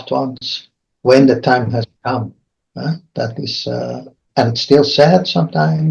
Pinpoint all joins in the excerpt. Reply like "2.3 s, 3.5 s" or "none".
none